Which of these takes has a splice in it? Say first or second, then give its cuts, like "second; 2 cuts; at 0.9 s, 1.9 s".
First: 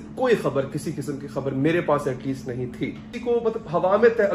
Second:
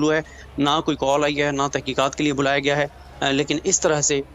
first; 1 cut; at 3.1 s